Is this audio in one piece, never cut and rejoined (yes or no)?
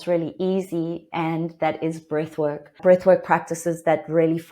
no